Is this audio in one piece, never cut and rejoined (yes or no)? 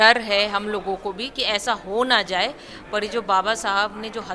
yes